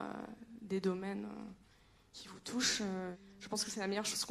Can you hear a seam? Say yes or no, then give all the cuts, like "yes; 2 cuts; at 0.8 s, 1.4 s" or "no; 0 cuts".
yes; 1 cut; at 3.1 s